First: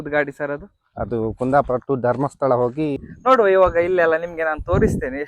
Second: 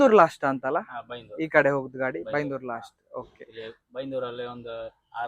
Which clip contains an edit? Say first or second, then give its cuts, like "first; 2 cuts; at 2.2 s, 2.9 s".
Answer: first; 1 cut; at 2.9 s